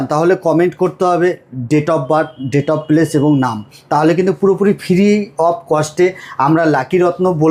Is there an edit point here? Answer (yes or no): no